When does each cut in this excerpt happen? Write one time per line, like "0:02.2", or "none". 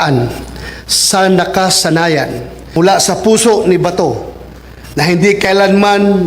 0:02.8